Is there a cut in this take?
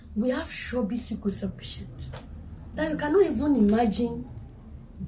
no; 0 cuts

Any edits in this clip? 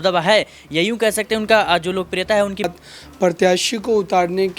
yes; 1 cut; at 2.7 s

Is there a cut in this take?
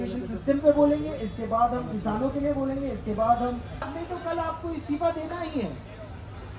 yes; 1 cut; at 3.9 s

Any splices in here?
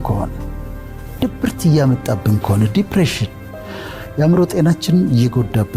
yes; 1 cut; at 3.4 s

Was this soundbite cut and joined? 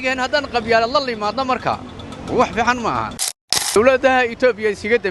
yes; 1 cut; at 3.6 s

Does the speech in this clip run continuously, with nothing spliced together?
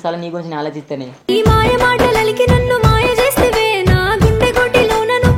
no; 1 cut; at 1.1 s

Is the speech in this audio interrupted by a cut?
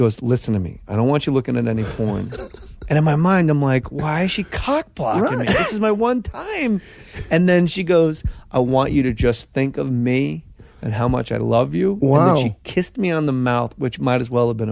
yes; 1 cut; at 6.9 s

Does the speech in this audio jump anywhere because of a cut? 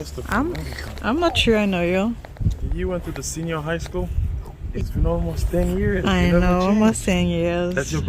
yes; 1 cut; at 4.6 s

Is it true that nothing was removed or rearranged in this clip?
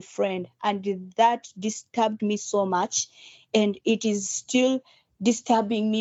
yes; 0 cuts

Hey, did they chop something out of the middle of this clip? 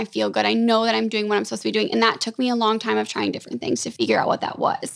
yes; 1 cut; at 3.9 s

